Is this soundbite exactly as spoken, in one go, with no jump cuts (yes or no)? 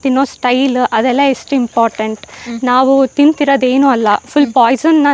yes